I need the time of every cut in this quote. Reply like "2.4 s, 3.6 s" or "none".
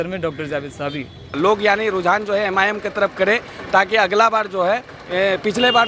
1.3 s